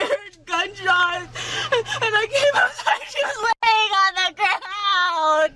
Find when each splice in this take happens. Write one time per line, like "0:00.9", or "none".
none